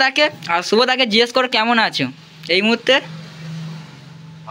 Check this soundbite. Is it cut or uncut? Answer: uncut